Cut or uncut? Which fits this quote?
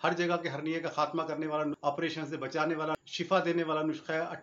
cut